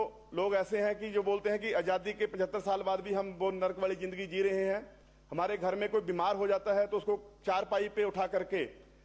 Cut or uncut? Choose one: uncut